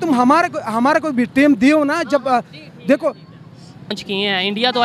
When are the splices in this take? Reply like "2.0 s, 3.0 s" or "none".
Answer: 3.9 s